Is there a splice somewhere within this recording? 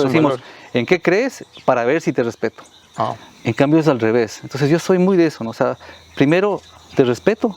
no; 0 cuts

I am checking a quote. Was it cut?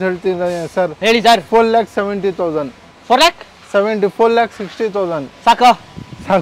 no; 0 cuts

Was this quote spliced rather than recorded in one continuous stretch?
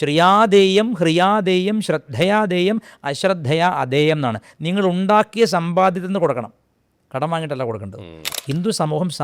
yes; 1 cut; at 8.2 s

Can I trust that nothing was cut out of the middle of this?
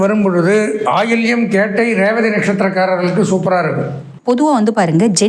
no; 1 cut; at 4.1 s

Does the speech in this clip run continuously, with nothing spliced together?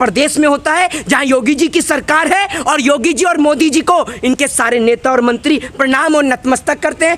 yes; 0 cuts

